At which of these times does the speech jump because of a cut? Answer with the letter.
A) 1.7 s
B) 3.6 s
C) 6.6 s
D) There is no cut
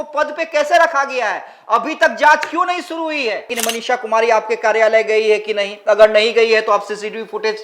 B